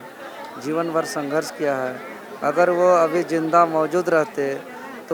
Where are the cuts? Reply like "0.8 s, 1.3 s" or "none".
none

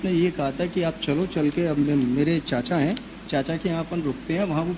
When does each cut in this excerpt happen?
none

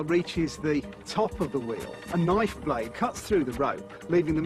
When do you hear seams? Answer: 3.5 s

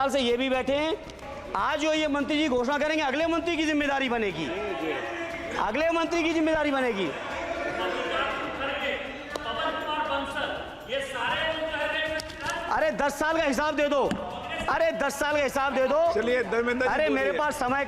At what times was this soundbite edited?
1.3 s

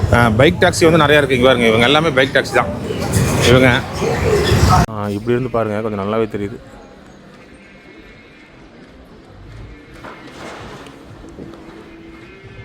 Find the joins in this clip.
4.9 s

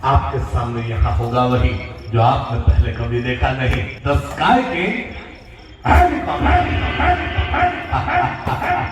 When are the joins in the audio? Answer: 3.9 s

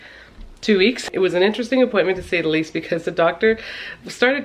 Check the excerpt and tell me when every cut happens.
1.0 s

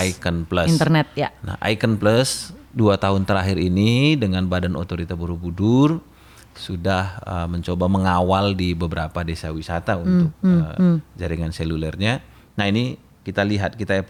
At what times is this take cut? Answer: none

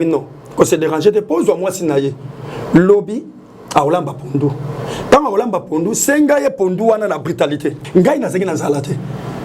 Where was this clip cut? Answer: 7.8 s

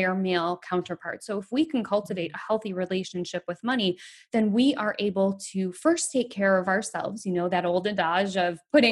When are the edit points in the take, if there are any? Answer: none

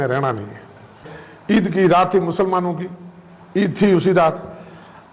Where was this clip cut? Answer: 1.0 s

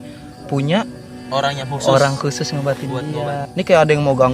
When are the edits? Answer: 3.4 s

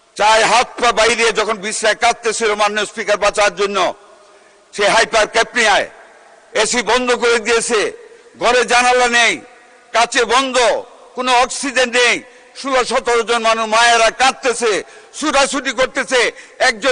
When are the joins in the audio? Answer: none

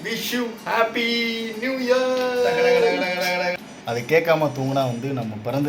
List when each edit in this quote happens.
3.6 s

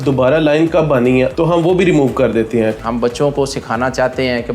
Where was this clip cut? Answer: 1.3 s, 2.8 s

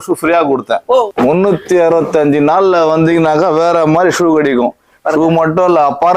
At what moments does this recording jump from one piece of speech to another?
1.1 s

